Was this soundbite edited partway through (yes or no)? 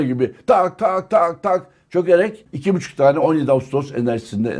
yes